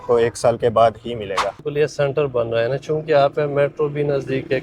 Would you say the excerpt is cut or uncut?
cut